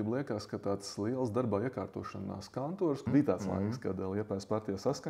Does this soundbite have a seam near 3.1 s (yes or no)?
yes